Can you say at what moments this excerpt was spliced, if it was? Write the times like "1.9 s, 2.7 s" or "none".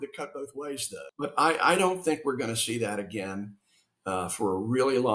1.0 s